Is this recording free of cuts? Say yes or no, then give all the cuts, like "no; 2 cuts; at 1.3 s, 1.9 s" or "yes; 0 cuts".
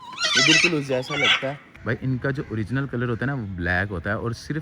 no; 1 cut; at 1.7 s